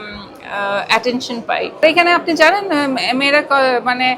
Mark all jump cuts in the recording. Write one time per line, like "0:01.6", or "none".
0:01.8